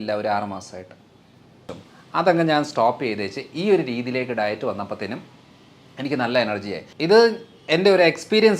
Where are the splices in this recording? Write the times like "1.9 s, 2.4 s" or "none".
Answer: 1.7 s, 6.8 s